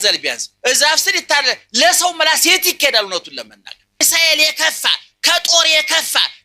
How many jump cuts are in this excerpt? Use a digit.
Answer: 1